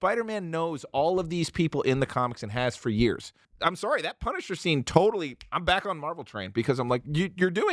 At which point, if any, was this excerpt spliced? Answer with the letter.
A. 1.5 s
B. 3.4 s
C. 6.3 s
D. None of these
B